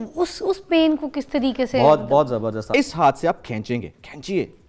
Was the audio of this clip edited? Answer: yes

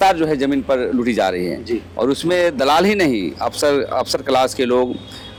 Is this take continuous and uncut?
yes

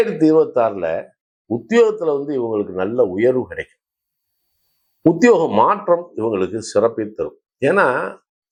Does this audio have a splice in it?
no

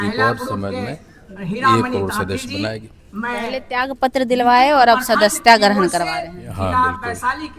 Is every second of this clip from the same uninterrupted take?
yes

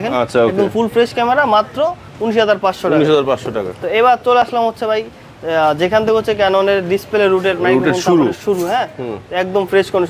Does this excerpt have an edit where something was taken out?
no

